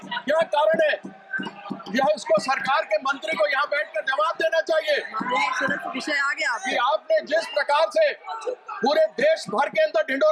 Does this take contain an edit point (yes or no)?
no